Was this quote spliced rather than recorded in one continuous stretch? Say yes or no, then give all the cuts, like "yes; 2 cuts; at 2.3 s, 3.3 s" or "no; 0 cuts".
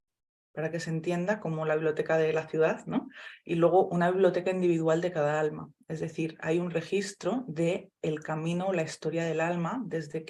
no; 0 cuts